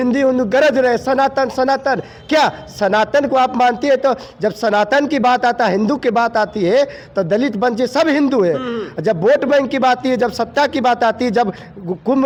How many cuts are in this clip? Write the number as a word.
zero